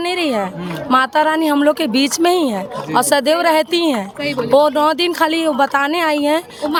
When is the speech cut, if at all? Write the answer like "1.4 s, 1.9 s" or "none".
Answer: none